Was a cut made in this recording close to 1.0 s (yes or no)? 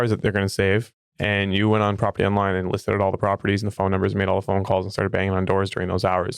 yes